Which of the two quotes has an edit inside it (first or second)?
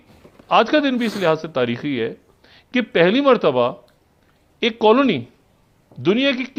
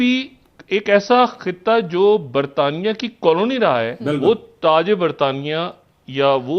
second